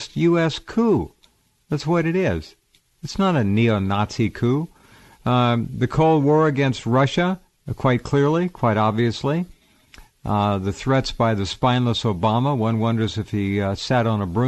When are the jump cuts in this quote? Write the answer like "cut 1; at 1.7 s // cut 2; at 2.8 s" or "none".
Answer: cut 1; at 11.0 s